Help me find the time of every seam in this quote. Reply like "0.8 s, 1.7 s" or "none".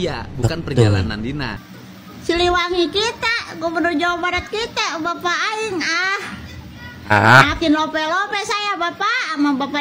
1.7 s